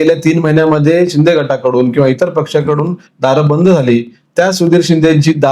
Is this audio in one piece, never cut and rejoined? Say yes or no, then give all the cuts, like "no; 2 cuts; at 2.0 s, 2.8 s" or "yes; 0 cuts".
yes; 0 cuts